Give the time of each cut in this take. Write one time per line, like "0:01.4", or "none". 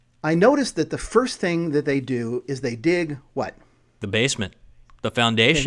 0:04.0